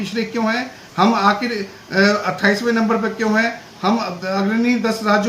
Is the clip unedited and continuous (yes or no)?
yes